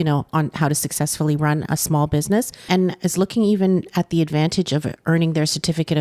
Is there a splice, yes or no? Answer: yes